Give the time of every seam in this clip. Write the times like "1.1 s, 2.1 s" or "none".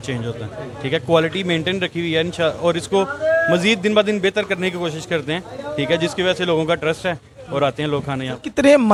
none